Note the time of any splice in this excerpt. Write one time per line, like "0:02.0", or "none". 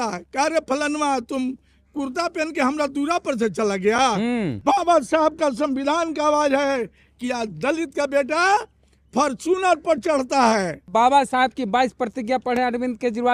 0:04.6
0:10.9